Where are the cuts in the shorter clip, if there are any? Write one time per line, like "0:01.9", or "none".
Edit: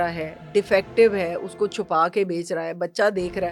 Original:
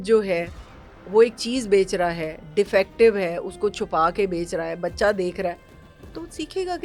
none